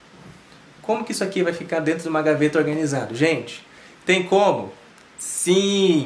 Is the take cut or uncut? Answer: uncut